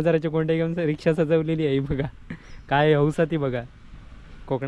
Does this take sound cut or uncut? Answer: uncut